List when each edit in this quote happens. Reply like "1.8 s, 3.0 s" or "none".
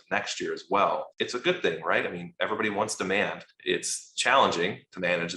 1.1 s, 3.5 s